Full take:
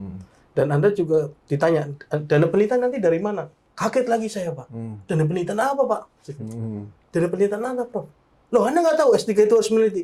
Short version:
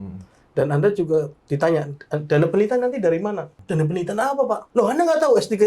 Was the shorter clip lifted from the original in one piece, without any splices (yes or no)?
no